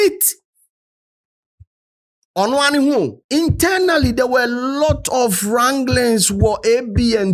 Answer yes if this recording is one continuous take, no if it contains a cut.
no